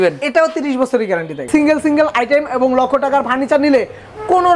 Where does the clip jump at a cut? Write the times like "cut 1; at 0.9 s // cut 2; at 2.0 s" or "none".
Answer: cut 1; at 1.4 s